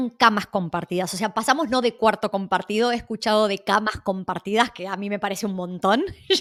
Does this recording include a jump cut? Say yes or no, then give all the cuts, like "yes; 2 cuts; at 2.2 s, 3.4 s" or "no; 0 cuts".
no; 0 cuts